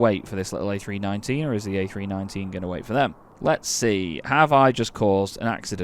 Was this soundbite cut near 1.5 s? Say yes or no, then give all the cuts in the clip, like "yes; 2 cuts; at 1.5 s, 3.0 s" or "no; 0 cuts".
no; 1 cut; at 3.3 s